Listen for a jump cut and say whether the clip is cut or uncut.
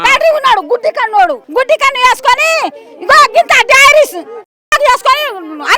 cut